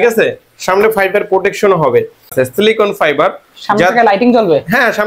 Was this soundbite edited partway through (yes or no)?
yes